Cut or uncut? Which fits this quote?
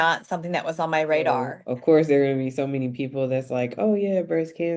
cut